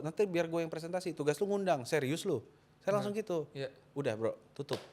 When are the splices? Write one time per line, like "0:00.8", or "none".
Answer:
none